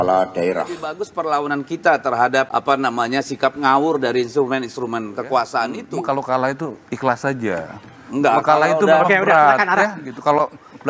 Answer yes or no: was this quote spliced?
yes